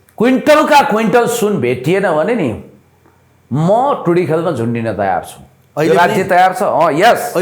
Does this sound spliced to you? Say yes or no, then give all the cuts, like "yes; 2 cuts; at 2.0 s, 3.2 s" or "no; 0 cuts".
no; 0 cuts